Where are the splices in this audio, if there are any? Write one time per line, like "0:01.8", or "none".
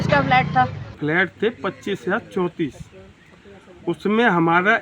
0:01.0